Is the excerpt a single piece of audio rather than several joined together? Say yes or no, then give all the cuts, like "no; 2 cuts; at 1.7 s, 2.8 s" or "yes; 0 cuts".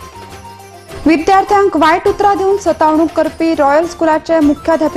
yes; 0 cuts